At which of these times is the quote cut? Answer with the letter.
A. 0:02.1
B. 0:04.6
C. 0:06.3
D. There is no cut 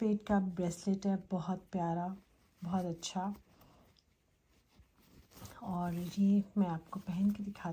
D